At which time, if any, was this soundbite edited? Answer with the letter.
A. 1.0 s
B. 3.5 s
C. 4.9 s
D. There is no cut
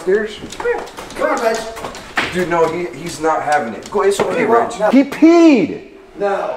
C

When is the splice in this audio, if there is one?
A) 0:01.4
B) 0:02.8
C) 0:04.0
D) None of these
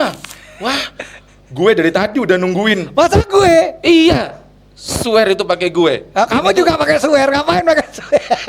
D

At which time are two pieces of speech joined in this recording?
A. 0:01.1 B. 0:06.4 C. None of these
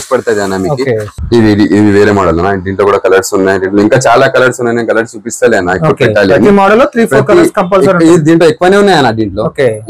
A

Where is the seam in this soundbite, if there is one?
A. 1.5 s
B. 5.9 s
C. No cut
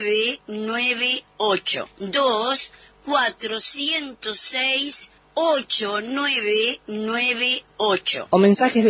C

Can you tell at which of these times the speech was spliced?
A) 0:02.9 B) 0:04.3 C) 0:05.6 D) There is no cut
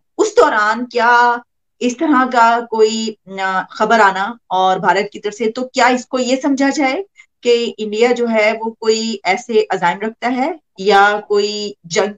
D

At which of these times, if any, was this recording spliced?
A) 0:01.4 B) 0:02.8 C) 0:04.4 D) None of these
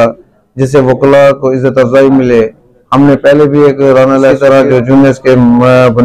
C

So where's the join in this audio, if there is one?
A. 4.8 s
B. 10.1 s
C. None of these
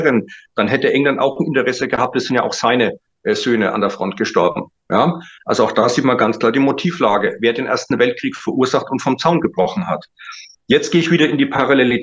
C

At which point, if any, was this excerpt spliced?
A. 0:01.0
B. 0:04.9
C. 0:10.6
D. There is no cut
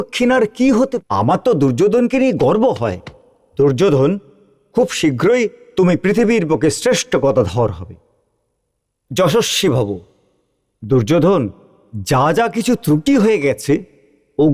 A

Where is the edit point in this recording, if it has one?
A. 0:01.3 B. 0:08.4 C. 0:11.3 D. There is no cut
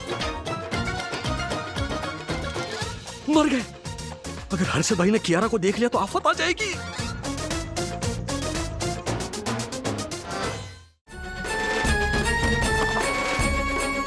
C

